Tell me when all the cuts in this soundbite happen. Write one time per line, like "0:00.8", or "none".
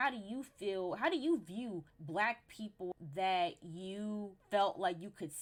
none

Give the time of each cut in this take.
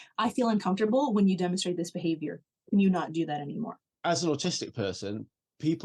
0:03.8

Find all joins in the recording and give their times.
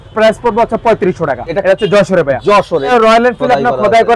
0:01.5
0:02.9

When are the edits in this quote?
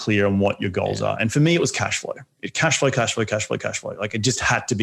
none

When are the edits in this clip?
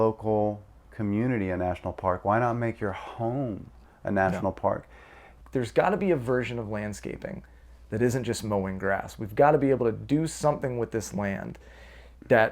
0:05.3

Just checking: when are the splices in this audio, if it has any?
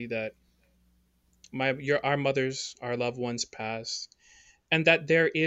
none

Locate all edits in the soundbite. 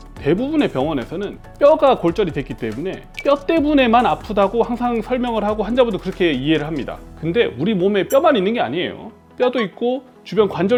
none

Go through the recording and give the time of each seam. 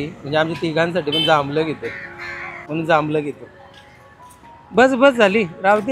0:02.5

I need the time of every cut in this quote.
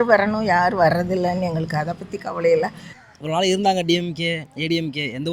0:02.9

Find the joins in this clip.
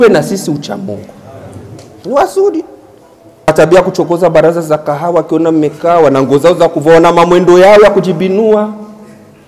0:03.5

